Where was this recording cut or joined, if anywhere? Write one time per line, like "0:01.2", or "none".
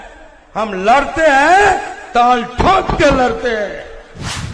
none